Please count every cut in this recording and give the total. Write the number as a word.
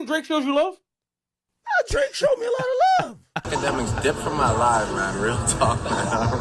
one